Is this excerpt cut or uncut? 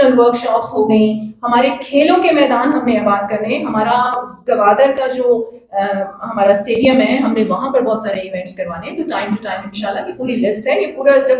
uncut